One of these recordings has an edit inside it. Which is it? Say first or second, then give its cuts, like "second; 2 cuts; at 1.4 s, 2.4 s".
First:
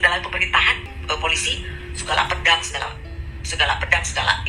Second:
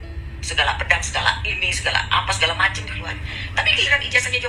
first; 1 cut; at 0.9 s